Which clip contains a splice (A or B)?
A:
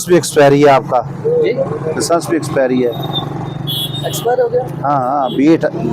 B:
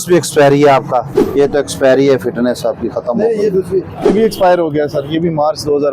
B